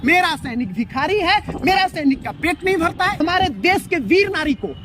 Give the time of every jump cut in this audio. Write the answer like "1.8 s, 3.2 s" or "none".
3.2 s